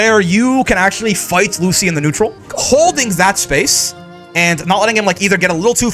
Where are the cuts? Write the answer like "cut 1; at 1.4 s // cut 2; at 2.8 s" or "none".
cut 1; at 2.5 s